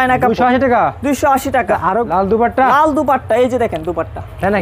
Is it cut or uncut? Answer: cut